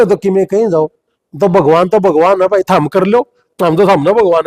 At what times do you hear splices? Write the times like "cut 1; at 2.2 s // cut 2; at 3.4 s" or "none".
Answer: none